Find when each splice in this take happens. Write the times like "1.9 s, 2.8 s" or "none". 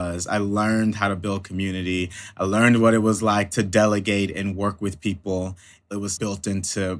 3.5 s, 5.9 s